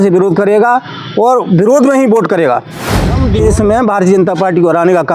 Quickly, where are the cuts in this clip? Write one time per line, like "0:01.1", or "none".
0:03.2

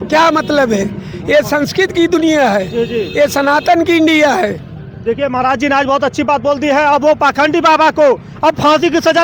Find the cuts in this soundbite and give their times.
none

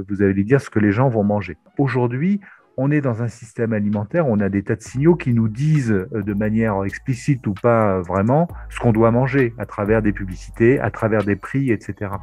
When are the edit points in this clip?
0:01.7

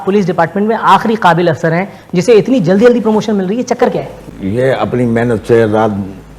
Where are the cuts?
0:04.2

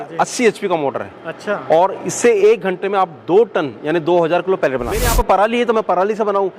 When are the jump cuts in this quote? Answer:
0:05.1

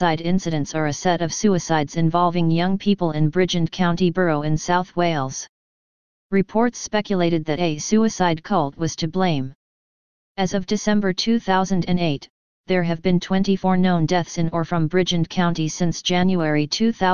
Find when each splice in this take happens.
0:07.8

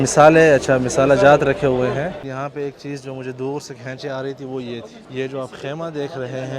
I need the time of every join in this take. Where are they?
0:02.1
0:05.0

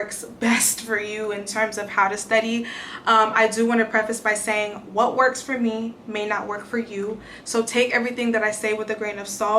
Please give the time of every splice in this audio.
none

